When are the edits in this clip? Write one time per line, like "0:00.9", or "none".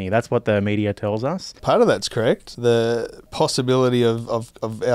0:01.5
0:02.5
0:03.2

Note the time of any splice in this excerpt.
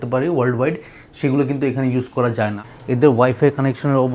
0:02.6

